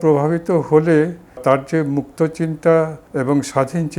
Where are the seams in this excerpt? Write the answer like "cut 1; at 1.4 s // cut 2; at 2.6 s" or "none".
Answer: cut 1; at 1.4 s // cut 2; at 3.0 s